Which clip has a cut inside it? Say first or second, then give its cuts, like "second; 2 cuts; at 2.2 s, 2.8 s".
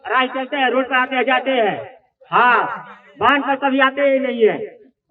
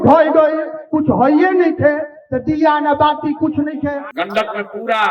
second; 1 cut; at 4.1 s